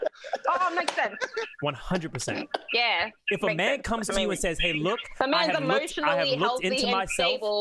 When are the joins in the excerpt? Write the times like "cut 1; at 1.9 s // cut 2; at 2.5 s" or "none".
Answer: none